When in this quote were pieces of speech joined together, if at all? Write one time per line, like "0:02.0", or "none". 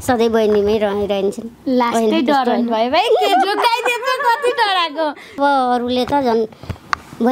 0:05.4

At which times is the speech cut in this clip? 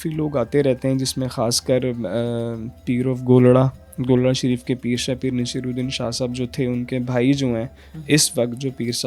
none

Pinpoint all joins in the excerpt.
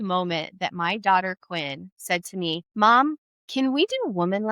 0:02.7

